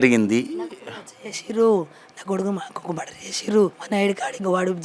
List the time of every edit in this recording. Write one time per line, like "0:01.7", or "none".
0:03.8